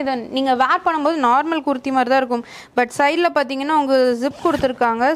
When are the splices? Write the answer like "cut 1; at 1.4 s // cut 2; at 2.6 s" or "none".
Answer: none